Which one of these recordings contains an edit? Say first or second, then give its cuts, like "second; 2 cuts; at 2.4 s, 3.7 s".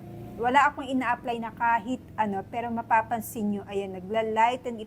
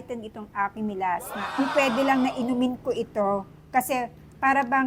second; 1 cut; at 1.6 s